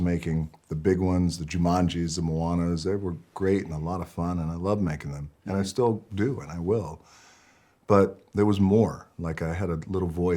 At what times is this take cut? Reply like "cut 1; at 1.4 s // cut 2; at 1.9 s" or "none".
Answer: none

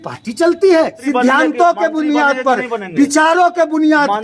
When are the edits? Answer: cut 1; at 1.0 s

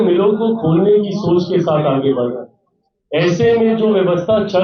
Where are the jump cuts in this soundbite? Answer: none

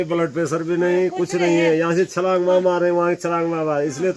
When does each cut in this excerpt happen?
none

